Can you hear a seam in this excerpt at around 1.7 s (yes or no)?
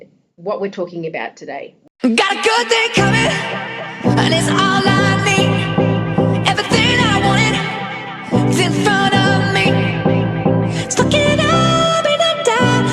yes